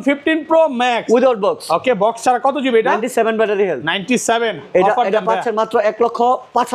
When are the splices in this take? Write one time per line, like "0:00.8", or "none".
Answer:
none